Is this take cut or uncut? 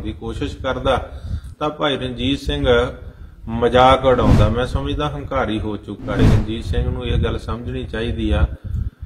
cut